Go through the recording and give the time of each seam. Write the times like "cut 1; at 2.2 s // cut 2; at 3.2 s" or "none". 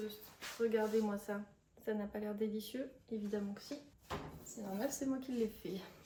none